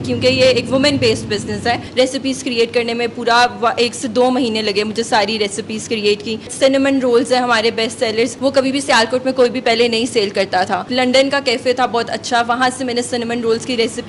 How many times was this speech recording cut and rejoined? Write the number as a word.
four